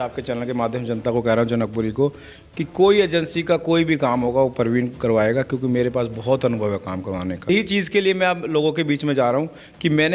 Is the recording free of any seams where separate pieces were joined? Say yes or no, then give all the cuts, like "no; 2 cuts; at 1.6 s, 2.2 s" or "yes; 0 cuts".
no; 1 cut; at 7.5 s